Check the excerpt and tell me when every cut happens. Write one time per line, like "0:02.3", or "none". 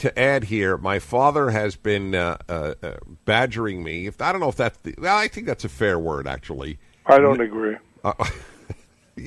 none